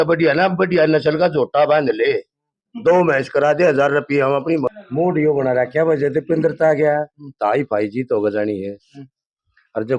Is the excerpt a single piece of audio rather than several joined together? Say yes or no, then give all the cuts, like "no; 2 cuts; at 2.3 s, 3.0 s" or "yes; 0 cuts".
no; 1 cut; at 4.6 s